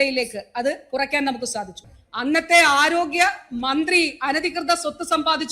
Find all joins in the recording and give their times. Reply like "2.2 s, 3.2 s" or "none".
1.9 s

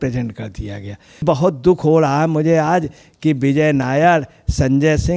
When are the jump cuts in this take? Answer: 1.2 s

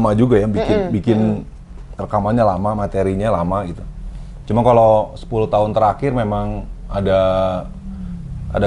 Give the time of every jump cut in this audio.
none

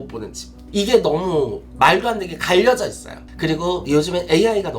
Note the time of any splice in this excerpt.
3.1 s

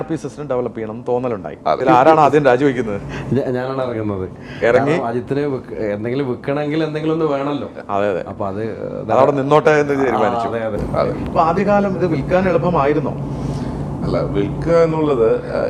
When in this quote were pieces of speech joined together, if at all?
1.8 s, 10.8 s

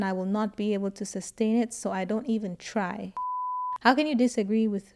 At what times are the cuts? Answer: 3.5 s

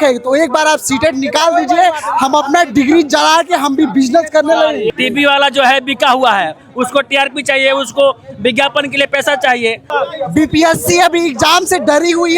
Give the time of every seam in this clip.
4.9 s, 9.8 s

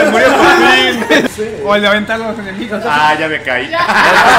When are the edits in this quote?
1.3 s

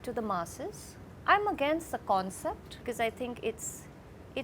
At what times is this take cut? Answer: 1.1 s, 2.8 s

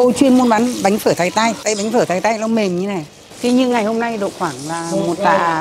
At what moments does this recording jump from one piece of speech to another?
1.6 s, 3.4 s

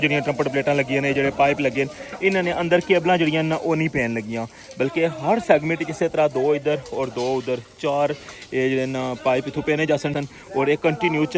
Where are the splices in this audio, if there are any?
none

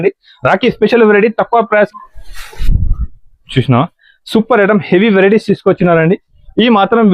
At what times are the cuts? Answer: 1.9 s

